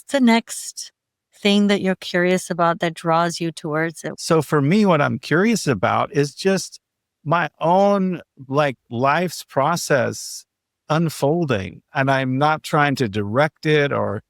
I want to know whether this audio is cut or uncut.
cut